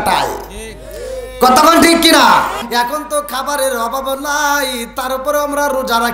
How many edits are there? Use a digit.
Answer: 1